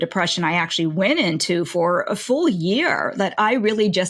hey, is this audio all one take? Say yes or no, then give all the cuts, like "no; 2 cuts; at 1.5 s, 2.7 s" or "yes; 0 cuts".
yes; 0 cuts